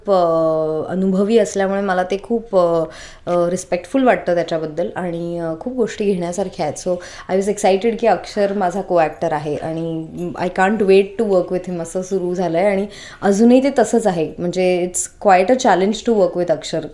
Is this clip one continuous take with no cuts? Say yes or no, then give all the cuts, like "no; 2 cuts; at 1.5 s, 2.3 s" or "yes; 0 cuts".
yes; 0 cuts